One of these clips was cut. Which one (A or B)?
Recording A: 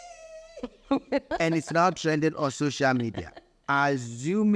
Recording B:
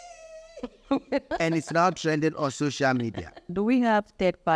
B